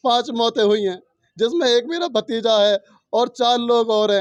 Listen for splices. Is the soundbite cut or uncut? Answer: uncut